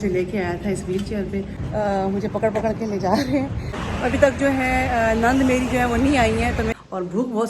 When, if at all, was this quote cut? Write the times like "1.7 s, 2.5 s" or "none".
1.6 s, 3.8 s, 6.7 s